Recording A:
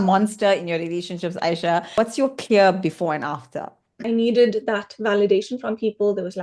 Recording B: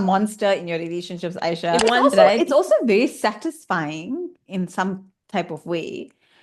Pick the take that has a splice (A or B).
B